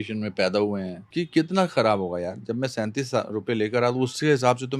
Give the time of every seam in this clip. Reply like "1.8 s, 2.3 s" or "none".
1.0 s

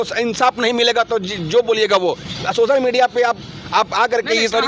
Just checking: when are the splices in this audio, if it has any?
none

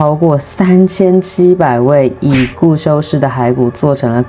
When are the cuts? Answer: none

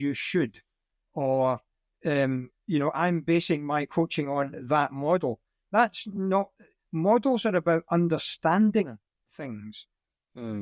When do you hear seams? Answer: none

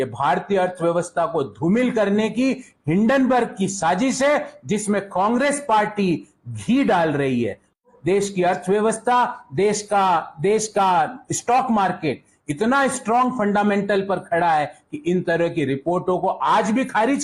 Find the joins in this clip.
7.9 s

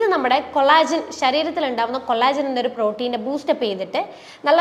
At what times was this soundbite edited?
none

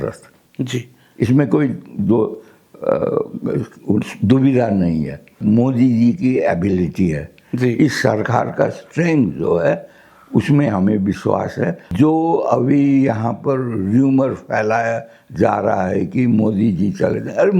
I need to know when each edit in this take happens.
5.4 s, 11.8 s

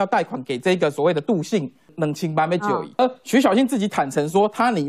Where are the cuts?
1.8 s, 3.0 s

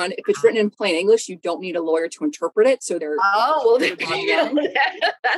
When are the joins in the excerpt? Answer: 3.0 s

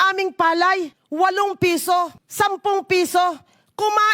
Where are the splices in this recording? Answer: 1.0 s, 2.2 s

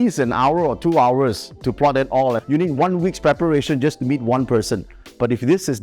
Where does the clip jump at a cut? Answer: 2.4 s

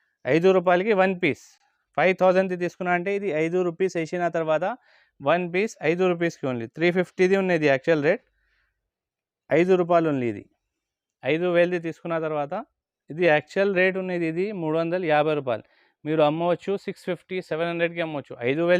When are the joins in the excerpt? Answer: none

